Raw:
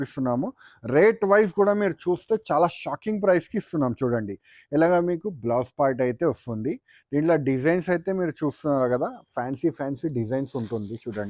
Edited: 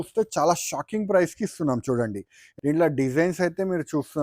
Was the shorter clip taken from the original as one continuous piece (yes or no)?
no